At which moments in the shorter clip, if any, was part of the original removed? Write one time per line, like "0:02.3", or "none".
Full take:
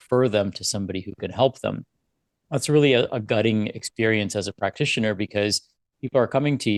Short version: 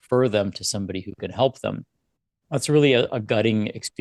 none